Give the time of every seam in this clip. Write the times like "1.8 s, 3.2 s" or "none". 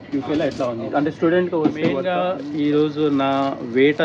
2.1 s